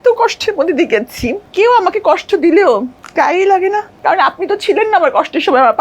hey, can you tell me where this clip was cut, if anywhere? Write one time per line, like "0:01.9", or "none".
0:01.4
0:03.0
0:03.9